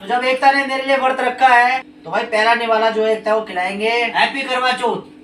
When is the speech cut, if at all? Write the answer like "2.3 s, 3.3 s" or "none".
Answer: 1.9 s, 4.1 s